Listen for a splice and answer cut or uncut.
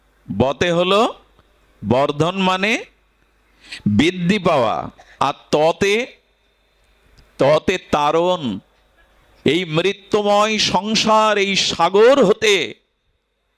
cut